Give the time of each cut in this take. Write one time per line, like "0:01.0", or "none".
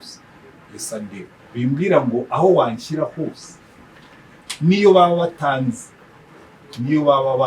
0:01.4